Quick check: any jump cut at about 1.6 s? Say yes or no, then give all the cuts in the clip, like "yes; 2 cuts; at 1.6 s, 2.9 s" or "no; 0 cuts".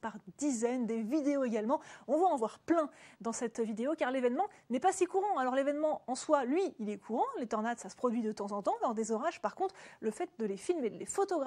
yes; 1 cut; at 1.6 s